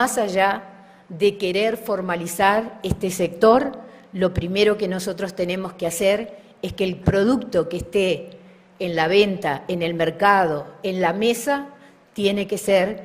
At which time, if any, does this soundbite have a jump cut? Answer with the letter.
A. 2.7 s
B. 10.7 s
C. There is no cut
C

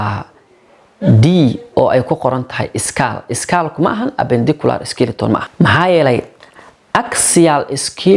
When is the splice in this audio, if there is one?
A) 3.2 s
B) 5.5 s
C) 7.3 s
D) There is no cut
B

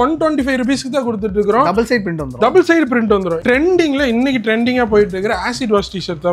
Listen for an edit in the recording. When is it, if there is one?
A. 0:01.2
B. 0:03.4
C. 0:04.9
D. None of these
B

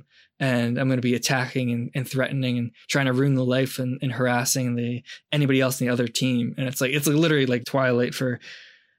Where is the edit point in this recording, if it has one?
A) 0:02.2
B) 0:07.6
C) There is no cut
B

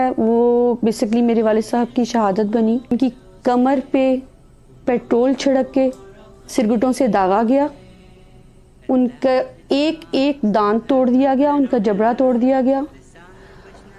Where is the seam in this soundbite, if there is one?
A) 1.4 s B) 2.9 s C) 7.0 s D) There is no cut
B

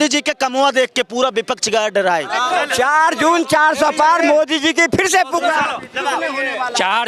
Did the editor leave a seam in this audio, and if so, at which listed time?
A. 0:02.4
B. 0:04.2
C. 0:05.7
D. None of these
A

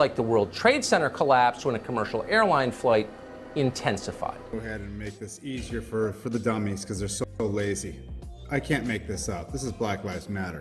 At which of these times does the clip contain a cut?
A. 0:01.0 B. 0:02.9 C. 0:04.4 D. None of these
C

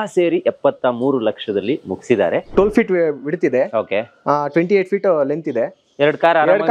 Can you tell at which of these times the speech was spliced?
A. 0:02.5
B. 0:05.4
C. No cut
A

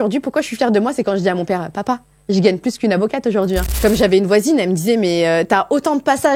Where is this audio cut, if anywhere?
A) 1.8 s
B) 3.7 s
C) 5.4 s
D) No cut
B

